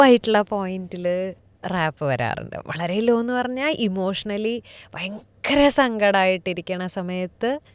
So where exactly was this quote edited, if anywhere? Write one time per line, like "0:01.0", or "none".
0:01.5